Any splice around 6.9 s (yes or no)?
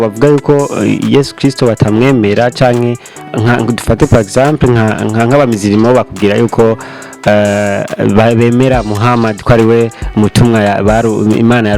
no